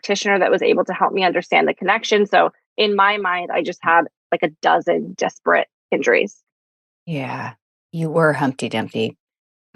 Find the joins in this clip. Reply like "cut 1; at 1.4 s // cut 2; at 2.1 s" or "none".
none